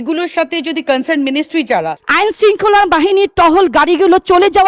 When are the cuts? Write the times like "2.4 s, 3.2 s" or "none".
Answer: 2.0 s

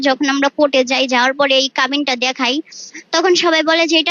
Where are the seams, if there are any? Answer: none

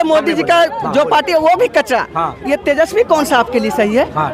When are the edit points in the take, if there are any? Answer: none

